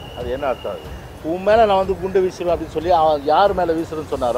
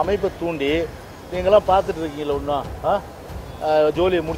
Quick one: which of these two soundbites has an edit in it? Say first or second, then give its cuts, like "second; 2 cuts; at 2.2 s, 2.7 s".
first; 1 cut; at 1.1 s